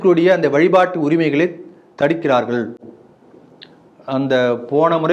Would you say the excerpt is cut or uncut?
uncut